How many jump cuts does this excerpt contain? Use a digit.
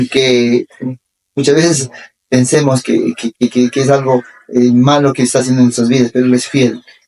0